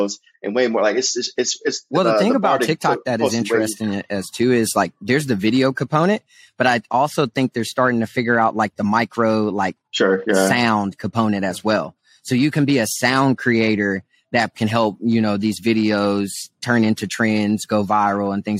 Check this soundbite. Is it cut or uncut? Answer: cut